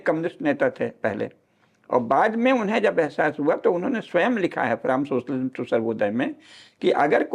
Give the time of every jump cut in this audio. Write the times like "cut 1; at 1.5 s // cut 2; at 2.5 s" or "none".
none